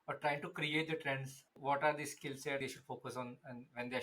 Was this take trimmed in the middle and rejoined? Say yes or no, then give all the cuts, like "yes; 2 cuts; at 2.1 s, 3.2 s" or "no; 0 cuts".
yes; 2 cuts; at 1.5 s, 2.6 s